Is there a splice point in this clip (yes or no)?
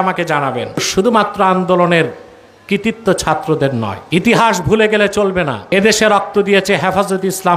yes